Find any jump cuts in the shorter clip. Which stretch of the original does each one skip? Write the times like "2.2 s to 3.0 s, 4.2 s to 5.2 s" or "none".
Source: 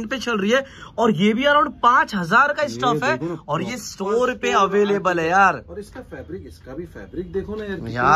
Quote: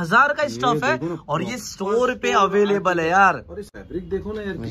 6.0 s to 7.0 s